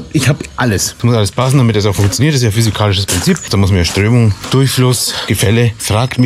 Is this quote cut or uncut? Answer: cut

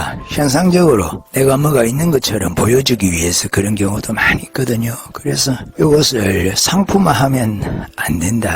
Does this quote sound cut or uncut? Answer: cut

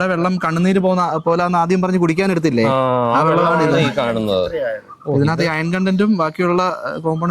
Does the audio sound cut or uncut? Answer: uncut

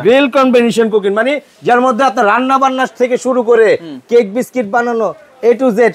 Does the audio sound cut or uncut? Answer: uncut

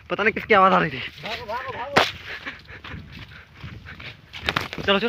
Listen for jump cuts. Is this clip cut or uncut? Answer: uncut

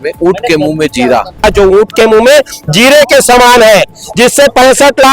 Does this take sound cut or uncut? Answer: cut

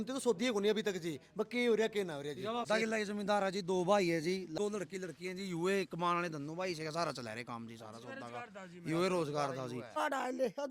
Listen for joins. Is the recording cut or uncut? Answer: cut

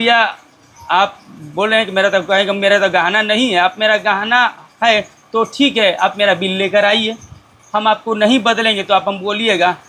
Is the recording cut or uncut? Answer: uncut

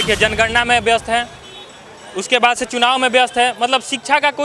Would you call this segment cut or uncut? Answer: uncut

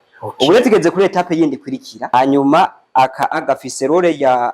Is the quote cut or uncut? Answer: cut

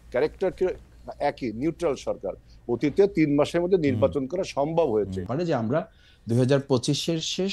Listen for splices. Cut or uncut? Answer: cut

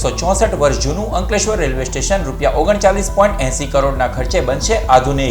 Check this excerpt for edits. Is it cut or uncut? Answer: uncut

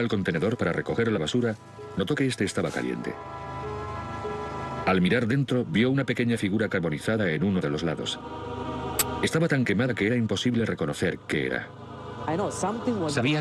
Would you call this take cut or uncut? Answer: uncut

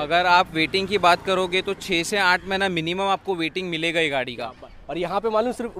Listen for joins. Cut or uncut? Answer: uncut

